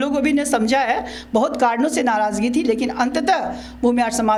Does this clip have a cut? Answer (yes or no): no